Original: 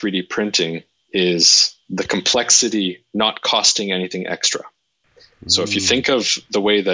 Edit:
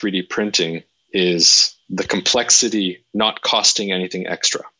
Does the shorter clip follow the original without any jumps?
yes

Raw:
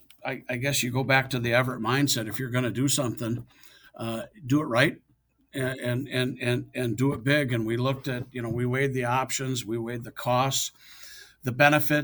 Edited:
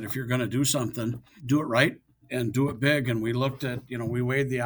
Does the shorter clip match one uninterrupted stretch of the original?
no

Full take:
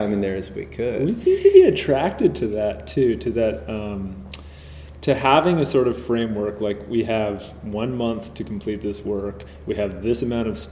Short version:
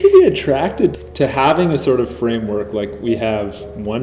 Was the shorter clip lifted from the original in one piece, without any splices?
no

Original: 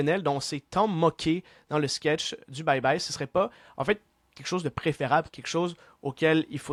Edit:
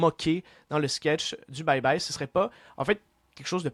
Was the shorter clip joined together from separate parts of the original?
no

